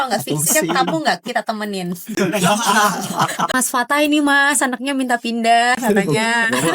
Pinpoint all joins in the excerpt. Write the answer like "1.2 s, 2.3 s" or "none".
3.5 s